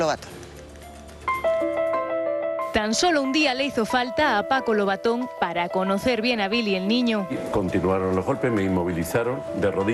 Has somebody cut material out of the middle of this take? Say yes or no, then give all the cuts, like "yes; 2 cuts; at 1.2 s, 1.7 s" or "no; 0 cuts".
no; 0 cuts